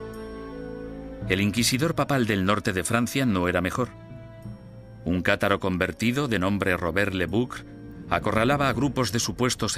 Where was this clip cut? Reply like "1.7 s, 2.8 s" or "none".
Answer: 7.1 s

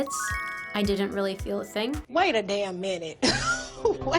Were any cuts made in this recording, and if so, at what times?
2.0 s

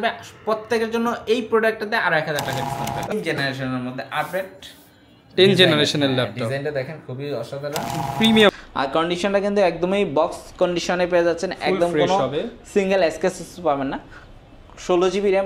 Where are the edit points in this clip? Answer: 3.1 s, 8.5 s

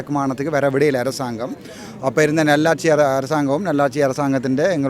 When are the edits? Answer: none

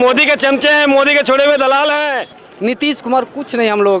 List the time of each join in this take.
2.3 s

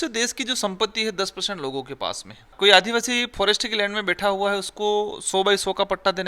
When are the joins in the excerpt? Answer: 2.5 s

